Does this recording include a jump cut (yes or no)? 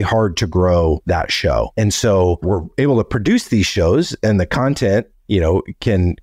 yes